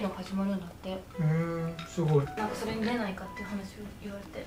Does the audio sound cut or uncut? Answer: uncut